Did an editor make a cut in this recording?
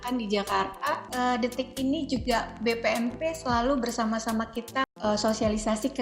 yes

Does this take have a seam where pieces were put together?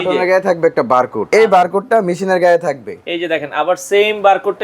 yes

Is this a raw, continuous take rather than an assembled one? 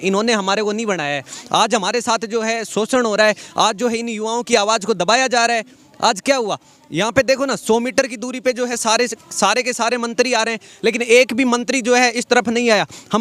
yes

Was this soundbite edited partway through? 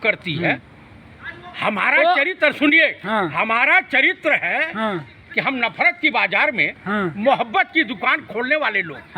no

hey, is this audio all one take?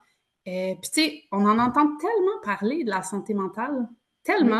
yes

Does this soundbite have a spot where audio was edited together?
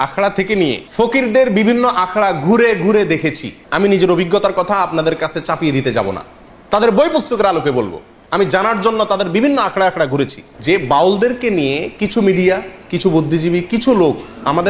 yes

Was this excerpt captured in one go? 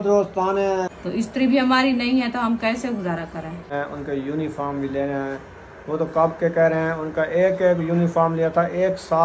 no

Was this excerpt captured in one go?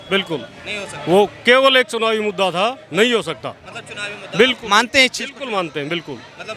yes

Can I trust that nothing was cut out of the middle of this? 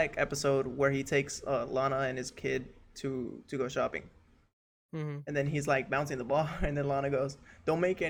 yes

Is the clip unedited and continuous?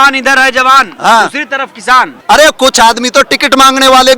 no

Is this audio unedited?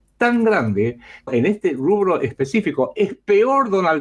no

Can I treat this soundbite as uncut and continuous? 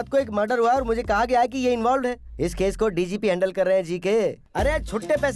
no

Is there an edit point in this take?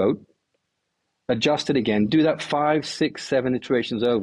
no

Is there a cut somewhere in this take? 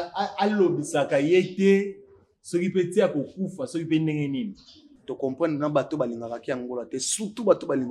yes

